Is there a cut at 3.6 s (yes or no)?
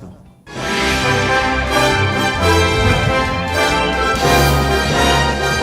yes